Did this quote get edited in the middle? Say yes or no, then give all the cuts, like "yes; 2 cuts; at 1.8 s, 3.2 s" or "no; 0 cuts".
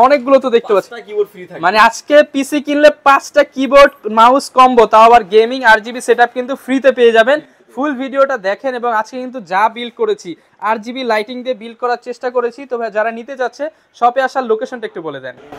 no; 0 cuts